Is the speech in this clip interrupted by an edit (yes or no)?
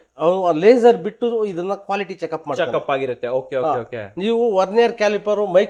no